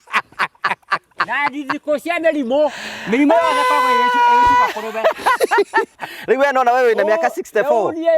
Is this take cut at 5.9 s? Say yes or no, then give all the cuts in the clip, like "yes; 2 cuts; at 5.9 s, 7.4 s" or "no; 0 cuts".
yes; 1 cut; at 5.9 s